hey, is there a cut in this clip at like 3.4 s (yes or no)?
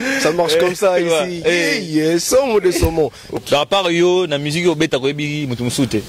yes